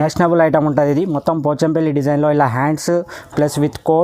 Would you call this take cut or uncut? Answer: uncut